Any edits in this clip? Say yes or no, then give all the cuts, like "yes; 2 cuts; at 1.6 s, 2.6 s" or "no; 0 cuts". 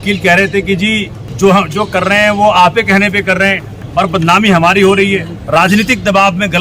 yes; 3 cuts; at 1.2 s, 3.7 s, 5.3 s